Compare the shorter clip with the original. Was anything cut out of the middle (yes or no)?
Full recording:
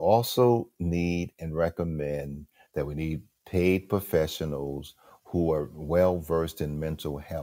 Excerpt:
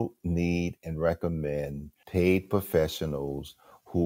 yes